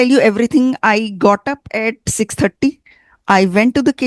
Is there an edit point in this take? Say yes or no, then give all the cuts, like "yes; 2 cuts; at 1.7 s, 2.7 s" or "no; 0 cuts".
no; 0 cuts